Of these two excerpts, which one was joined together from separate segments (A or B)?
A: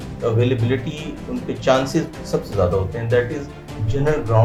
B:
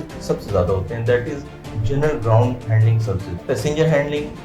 B